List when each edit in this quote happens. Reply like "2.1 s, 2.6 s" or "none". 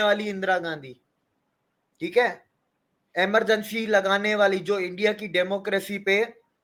none

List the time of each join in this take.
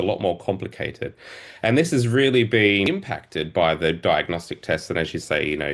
2.9 s

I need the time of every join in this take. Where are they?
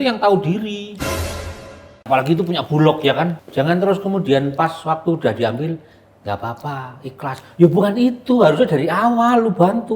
2.1 s, 3.4 s

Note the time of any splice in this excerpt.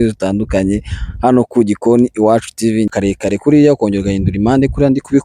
2.9 s

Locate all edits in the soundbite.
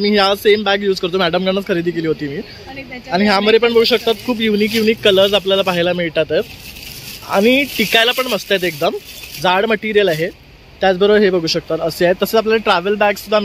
none

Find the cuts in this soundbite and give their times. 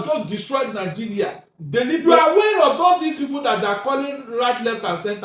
2.0 s

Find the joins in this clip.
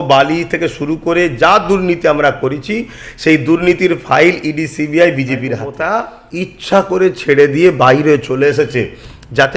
5.7 s

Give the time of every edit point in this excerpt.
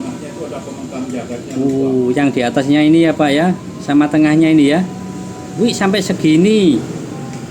none

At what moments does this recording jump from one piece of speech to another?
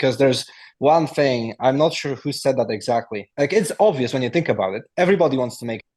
3.2 s

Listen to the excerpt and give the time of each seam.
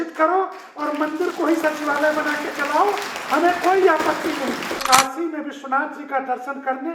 4.8 s

